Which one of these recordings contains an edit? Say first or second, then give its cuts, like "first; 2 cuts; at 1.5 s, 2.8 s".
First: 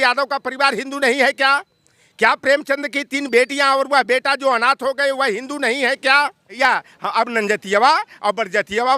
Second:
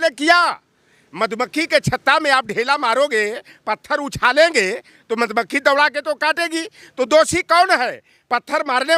first; 1 cut; at 6.6 s